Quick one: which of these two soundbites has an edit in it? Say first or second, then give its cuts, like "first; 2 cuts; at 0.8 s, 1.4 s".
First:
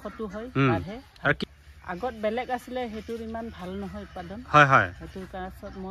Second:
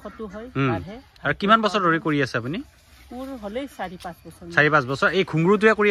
first; 1 cut; at 1.4 s